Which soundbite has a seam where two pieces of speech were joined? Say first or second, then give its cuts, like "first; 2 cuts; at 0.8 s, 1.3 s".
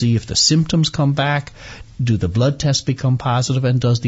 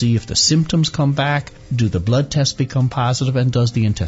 second; 1 cut; at 1.6 s